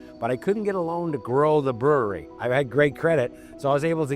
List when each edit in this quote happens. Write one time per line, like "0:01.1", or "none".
0:02.3